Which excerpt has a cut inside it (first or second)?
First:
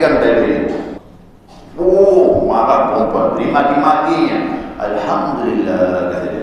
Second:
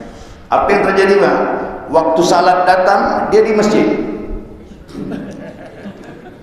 first